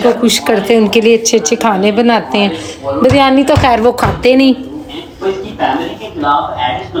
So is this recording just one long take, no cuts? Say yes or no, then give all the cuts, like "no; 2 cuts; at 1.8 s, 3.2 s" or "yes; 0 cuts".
yes; 0 cuts